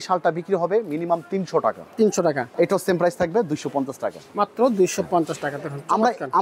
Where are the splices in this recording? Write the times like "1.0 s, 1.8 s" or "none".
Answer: 2.5 s